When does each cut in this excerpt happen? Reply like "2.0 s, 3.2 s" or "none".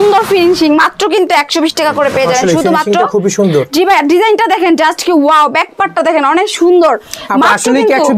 none